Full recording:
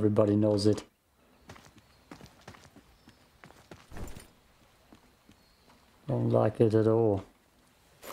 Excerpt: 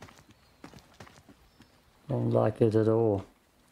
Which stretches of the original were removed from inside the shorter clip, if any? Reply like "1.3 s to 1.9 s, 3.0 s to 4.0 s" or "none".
3.3 s to 5.8 s